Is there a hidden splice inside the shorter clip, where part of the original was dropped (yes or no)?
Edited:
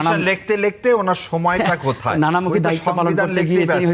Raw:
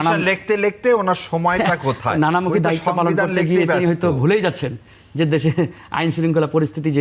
no